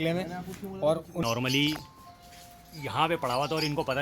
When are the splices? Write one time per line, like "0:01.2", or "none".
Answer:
0:01.2